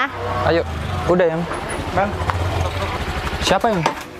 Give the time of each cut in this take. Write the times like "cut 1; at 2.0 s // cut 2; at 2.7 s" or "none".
cut 1; at 3.0 s

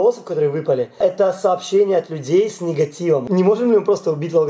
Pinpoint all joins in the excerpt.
cut 1; at 3.2 s

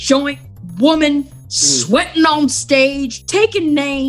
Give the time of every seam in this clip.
cut 1; at 3.2 s

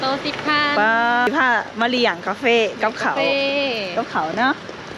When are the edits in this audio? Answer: cut 1; at 1.3 s

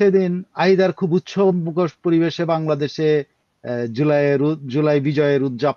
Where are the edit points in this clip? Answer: none

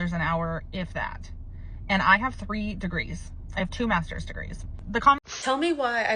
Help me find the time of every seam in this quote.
cut 1; at 5.2 s

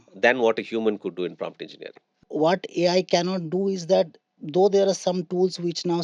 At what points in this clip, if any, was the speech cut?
cut 1; at 2.2 s

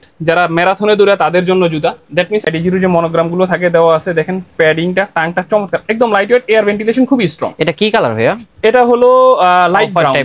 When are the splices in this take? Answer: cut 1; at 2.5 s

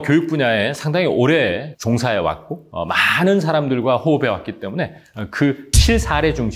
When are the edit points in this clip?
none

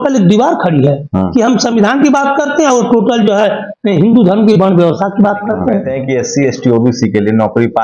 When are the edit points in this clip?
cut 1; at 5.9 s

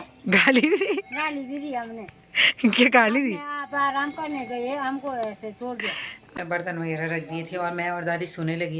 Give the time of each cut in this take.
cut 1; at 6.3 s

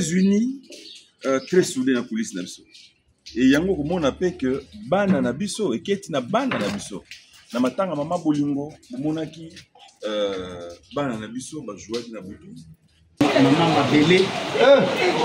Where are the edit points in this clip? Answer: cut 1; at 13.2 s

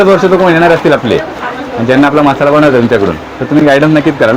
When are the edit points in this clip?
none

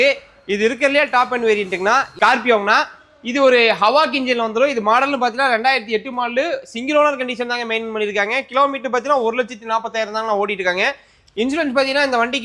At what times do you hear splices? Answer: cut 1; at 2.1 s

